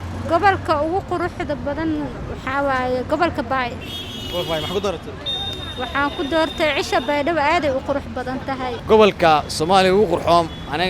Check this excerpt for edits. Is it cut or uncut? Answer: cut